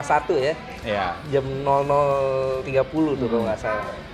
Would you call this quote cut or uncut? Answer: uncut